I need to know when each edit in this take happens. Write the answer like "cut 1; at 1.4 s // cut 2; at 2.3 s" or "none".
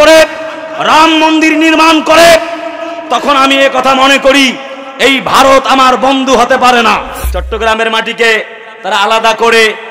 cut 1; at 7.2 s